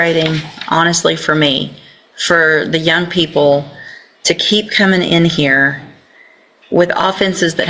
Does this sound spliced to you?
no; 0 cuts

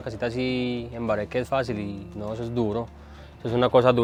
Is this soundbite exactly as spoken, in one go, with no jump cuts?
yes; 0 cuts

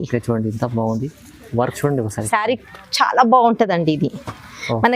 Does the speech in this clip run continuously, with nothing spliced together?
no; 1 cut; at 2.2 s

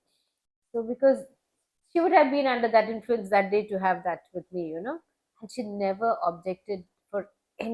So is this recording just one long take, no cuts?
yes; 0 cuts

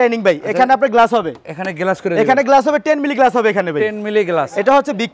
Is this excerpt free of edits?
yes; 0 cuts

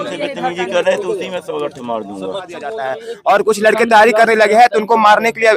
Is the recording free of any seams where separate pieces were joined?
no; 1 cut; at 3.0 s

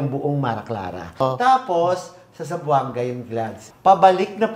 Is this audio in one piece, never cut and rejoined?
no; 2 cuts; at 1.2 s, 3.6 s

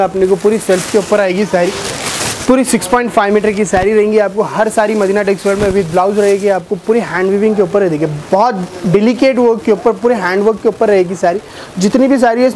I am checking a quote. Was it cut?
no; 0 cuts

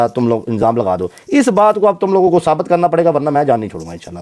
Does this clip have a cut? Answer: no; 0 cuts

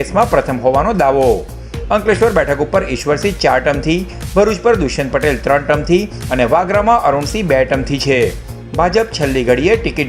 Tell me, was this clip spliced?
no; 0 cuts

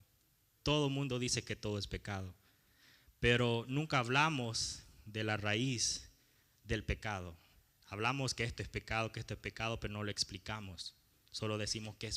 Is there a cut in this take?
no; 0 cuts

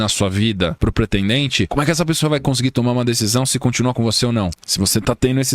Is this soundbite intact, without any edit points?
no; 1 cut; at 4.5 s

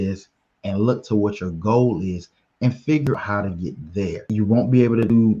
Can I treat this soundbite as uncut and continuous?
no; 1 cut; at 4.2 s

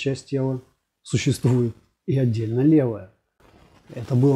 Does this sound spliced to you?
no; 0 cuts

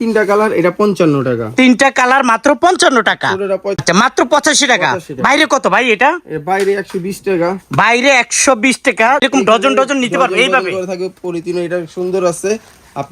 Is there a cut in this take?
yes; 2 cuts; at 3.8 s, 9.3 s

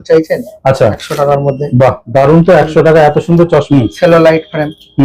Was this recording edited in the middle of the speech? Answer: yes; 2 cuts; at 1.0 s, 3.7 s

